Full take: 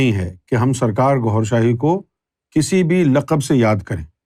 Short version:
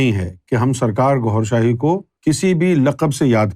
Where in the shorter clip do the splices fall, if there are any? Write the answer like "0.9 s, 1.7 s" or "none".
2.1 s

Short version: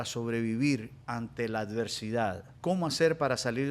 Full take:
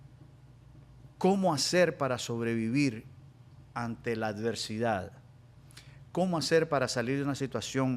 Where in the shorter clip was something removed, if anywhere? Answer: 1.0 s, 2.5 s

